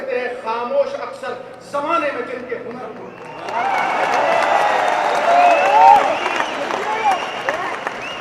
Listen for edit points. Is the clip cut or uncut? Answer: uncut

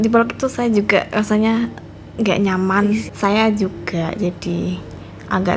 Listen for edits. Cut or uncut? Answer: cut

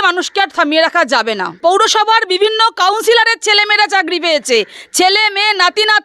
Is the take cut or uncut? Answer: cut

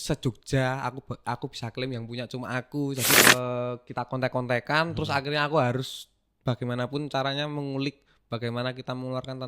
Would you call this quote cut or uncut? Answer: cut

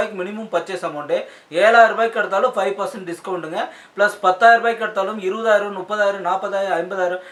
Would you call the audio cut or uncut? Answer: uncut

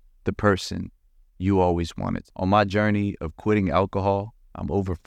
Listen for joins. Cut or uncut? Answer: cut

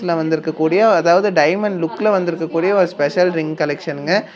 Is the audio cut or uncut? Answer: uncut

